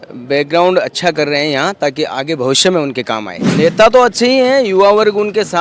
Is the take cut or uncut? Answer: cut